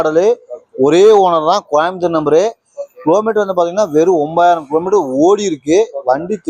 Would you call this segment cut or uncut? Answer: uncut